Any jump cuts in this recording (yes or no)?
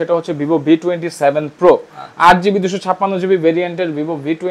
no